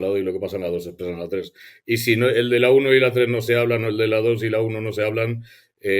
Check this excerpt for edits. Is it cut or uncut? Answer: uncut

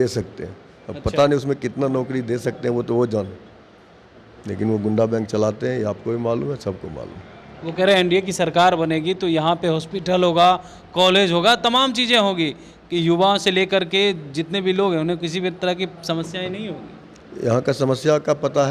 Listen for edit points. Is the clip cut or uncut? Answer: uncut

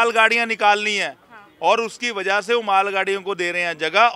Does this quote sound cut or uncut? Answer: uncut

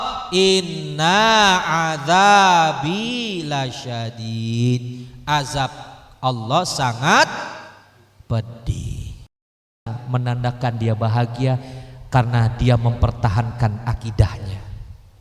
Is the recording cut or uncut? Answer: cut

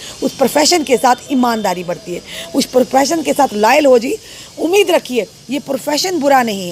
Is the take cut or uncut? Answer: uncut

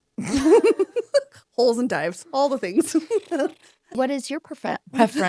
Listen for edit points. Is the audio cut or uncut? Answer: cut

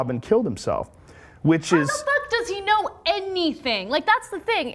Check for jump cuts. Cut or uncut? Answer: cut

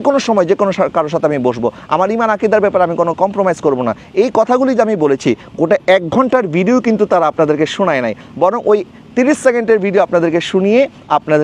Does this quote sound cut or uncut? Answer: uncut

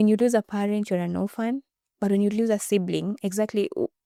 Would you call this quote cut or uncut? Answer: uncut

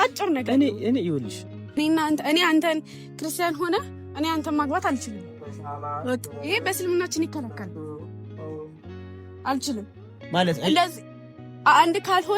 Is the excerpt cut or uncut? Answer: cut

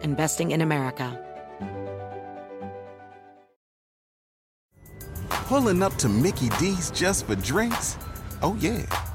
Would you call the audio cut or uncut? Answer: cut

